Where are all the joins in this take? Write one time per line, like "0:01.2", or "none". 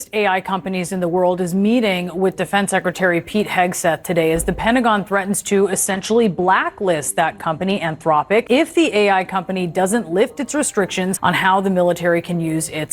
0:08.5
0:11.2

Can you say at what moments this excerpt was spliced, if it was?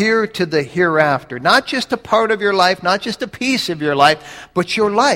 none

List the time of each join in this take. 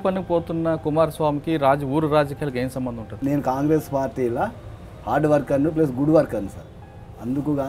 0:03.2

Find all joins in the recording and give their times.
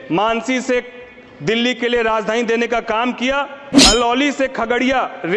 0:03.7

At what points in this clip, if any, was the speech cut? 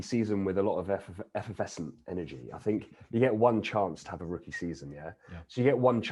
none

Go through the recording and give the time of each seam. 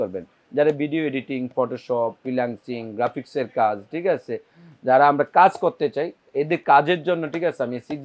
none

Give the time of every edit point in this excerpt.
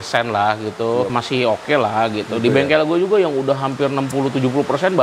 0:01.1

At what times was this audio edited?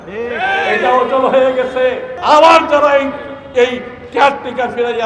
0:02.1

